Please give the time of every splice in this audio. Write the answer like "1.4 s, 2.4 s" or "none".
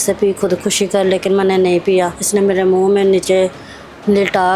2.2 s